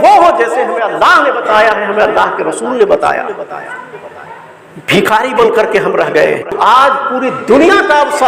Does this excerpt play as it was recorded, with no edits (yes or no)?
no